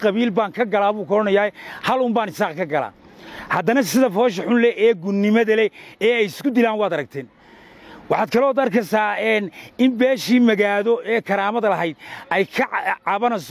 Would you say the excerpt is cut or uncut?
uncut